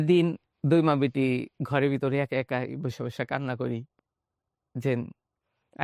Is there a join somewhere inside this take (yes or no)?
no